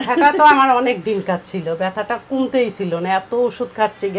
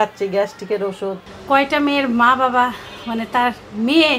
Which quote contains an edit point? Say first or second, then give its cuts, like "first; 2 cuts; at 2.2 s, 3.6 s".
second; 1 cut; at 1.3 s